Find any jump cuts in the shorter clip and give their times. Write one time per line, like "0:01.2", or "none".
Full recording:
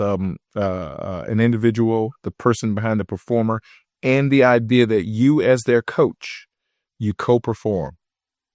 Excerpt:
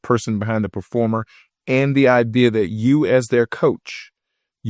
none